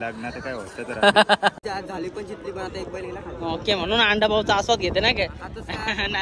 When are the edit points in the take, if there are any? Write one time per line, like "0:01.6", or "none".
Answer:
0:01.6